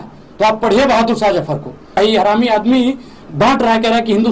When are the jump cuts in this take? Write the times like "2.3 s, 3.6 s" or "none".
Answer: 2.0 s

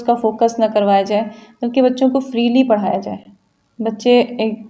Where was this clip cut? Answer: none

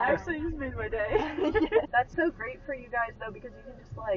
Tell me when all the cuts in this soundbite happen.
1.9 s

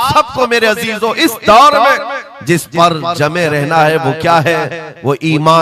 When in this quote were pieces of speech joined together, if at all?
none

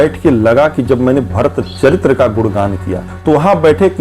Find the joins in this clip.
3.1 s

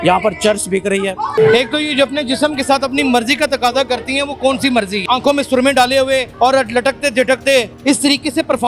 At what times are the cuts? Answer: 1.3 s, 5.0 s

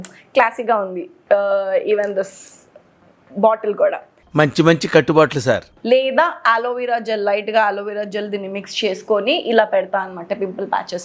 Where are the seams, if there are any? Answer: 5.7 s

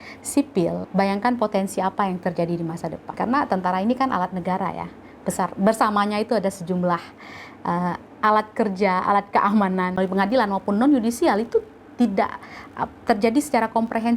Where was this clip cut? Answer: 0.8 s, 3.0 s, 10.0 s

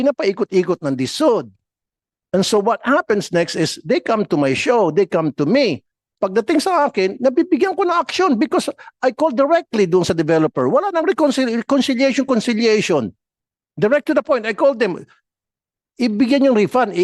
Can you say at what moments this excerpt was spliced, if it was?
none

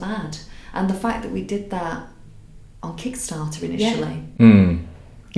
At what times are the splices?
none

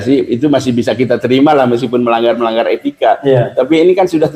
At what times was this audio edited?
none

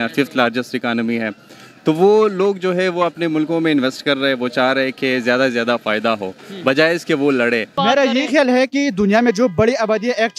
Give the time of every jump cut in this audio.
7.7 s

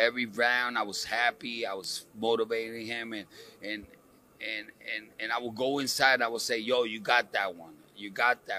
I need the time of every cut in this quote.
none

